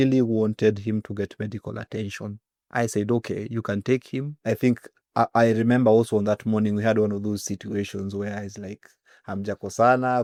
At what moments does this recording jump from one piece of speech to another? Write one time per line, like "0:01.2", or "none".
none